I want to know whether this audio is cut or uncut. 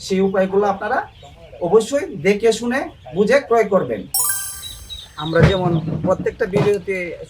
cut